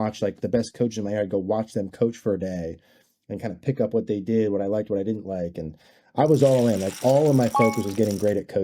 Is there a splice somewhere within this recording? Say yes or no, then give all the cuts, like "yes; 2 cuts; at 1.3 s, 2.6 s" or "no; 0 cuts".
no; 0 cuts